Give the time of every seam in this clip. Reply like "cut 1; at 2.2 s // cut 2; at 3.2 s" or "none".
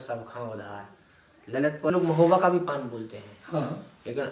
cut 1; at 1.9 s